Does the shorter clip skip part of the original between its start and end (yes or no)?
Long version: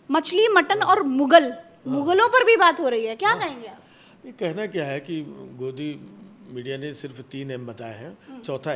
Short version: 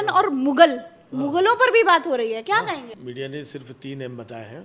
yes